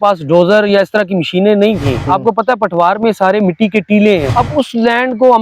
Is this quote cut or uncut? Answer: cut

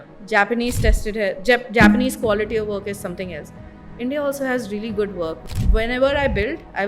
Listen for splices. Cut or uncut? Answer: cut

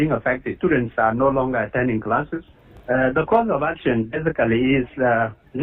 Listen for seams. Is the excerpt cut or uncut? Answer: cut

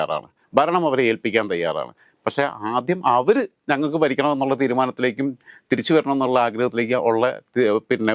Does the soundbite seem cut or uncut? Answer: uncut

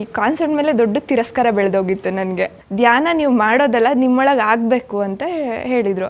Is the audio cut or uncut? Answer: cut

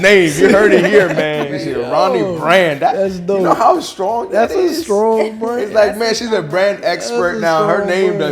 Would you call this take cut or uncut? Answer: cut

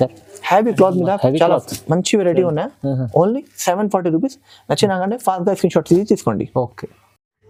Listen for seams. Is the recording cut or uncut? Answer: uncut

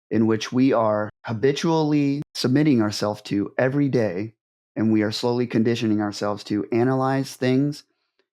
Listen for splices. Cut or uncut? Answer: cut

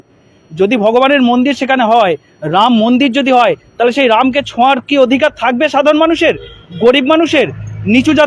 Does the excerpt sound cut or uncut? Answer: uncut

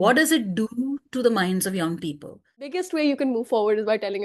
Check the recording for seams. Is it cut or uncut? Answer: cut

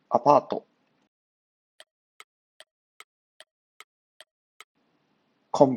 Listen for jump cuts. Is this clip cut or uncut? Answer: cut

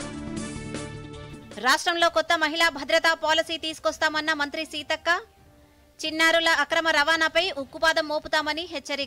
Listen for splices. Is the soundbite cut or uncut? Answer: cut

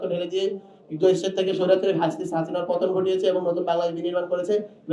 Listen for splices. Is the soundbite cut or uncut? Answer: uncut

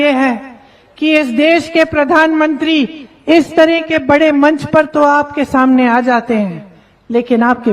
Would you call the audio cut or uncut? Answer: uncut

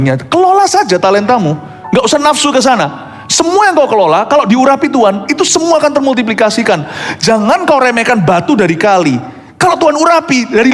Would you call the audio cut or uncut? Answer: uncut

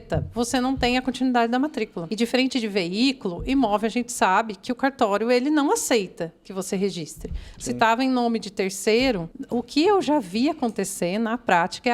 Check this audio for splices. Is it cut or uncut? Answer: cut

